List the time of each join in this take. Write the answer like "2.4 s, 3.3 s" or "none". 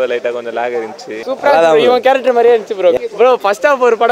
1.2 s, 3.0 s